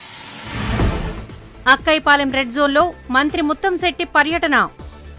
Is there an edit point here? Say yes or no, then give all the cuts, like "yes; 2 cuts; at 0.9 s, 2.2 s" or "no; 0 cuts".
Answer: yes; 1 cut; at 1.0 s